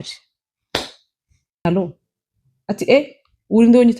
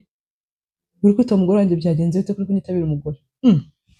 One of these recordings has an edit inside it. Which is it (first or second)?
first